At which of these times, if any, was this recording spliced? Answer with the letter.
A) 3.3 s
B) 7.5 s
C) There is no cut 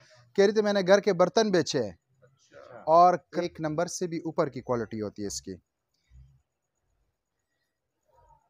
A